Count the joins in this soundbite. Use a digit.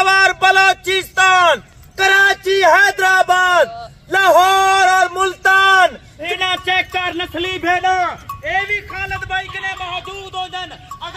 1